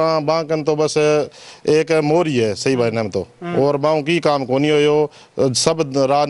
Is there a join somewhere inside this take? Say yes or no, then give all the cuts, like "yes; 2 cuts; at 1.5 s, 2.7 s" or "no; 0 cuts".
no; 0 cuts